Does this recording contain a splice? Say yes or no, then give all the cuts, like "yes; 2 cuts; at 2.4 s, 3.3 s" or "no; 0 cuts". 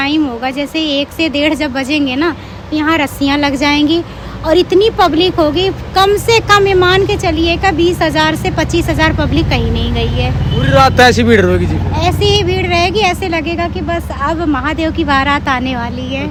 no; 0 cuts